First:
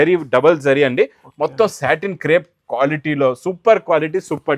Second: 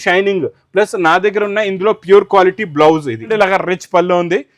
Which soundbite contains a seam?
second; 1 cut; at 3.3 s

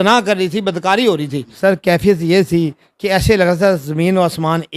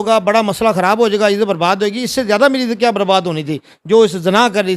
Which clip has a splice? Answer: first; 1 cut; at 1.4 s

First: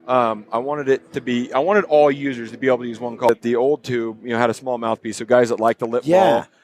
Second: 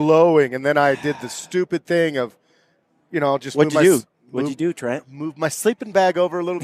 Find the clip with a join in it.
first; 1 cut; at 3.3 s

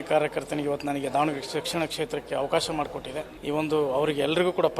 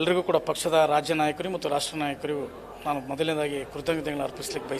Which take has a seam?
first; 1 cut; at 3.3 s

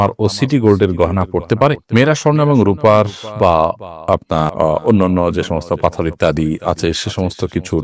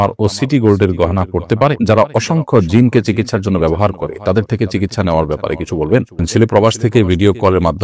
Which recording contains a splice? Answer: second; 2 cuts; at 1.8 s, 6.2 s

